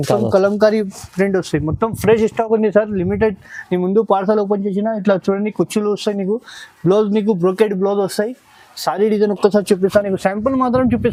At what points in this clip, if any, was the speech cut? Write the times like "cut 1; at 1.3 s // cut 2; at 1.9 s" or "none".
none